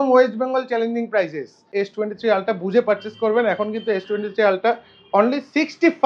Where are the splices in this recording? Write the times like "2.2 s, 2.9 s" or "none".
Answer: 1.7 s